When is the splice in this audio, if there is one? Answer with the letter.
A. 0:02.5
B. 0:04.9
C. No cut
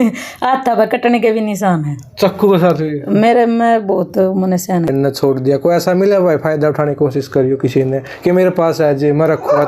B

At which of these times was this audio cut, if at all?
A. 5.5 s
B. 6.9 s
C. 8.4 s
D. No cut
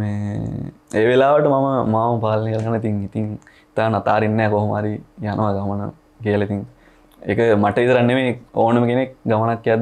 D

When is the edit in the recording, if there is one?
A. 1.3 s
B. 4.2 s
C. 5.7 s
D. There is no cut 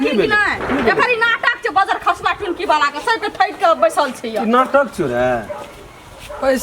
D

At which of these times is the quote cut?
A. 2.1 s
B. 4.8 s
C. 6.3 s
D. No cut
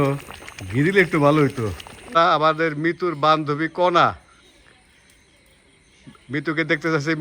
A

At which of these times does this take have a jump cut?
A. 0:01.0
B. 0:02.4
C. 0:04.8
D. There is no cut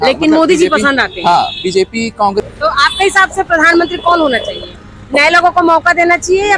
B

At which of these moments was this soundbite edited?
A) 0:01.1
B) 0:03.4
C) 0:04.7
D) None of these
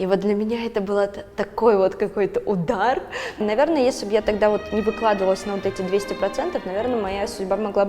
B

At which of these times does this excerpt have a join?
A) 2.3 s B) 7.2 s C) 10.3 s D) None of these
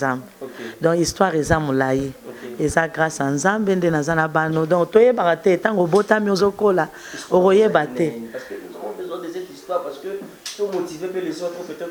D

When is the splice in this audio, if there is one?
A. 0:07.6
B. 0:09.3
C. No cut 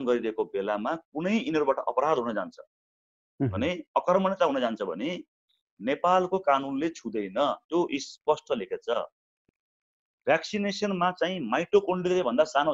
B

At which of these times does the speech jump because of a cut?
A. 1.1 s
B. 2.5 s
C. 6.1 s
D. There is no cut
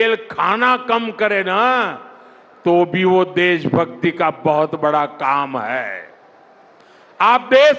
D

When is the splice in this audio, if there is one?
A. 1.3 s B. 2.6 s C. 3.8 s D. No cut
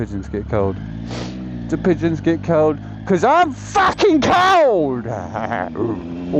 D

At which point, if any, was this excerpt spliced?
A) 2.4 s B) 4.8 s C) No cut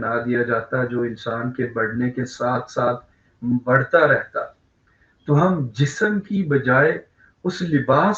C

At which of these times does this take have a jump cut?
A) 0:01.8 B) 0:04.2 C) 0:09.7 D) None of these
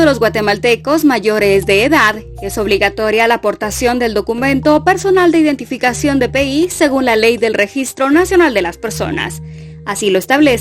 A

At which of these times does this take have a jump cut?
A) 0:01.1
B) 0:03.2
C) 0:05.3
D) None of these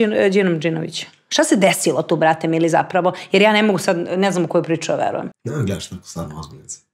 C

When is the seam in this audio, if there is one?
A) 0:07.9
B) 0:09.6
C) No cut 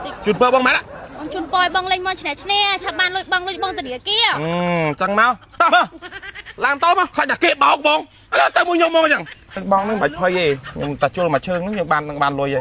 B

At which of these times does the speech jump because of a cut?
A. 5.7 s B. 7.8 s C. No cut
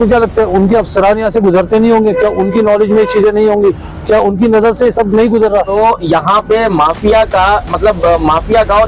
A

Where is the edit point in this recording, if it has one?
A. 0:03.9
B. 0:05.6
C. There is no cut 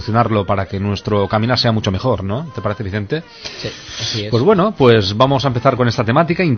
A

